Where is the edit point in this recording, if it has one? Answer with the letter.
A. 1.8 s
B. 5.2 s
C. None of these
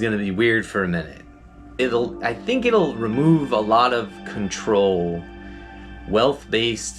A